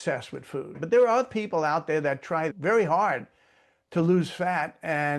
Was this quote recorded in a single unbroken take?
yes; 0 cuts

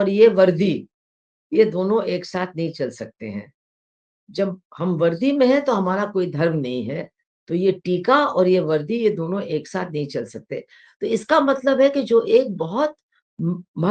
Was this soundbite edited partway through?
no; 0 cuts

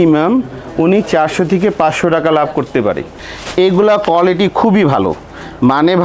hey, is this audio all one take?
no; 1 cut; at 3.1 s

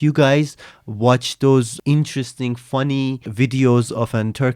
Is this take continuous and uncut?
no; 2 cuts; at 1.7 s, 3.3 s

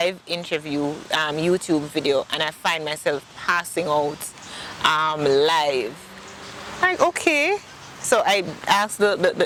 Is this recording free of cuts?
yes; 0 cuts

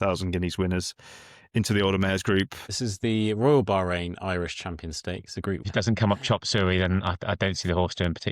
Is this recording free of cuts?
no; 2 cuts; at 2.6 s, 5.7 s

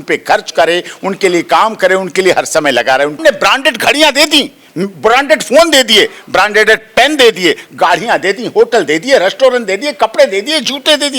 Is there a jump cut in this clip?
yes; 1 cut; at 3.2 s

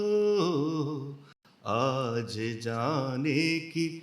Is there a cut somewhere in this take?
no; 0 cuts

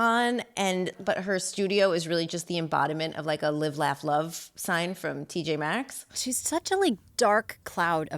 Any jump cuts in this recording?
yes; 2 cuts; at 1.0 s, 6.1 s

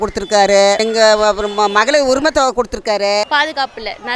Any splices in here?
yes; 1 cut; at 3.2 s

